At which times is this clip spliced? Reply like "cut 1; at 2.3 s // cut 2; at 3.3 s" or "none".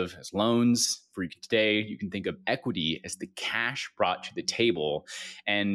none